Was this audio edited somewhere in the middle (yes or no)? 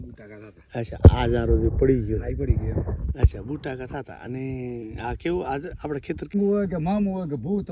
yes